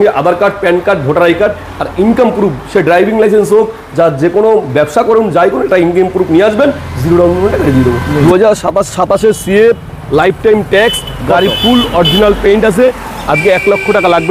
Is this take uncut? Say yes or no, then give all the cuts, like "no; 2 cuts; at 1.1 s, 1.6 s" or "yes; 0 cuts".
no; 1 cut; at 8.2 s